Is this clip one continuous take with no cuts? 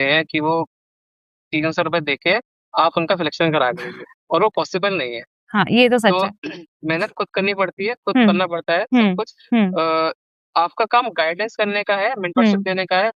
yes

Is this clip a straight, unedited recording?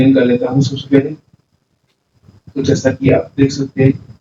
yes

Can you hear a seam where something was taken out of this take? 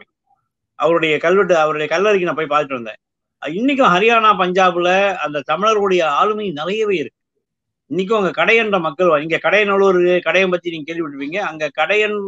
no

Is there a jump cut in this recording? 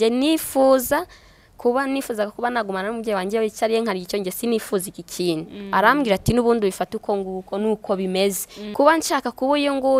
yes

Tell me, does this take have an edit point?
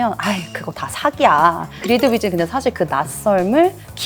yes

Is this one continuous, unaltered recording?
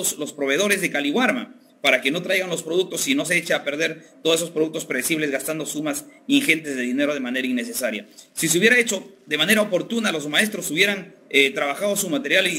yes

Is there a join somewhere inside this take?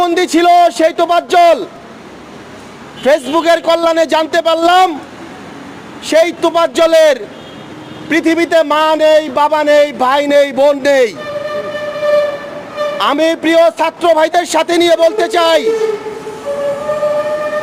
no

